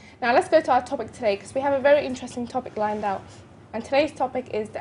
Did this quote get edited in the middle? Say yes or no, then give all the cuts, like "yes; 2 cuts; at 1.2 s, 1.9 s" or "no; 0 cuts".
yes; 1 cut; at 1.3 s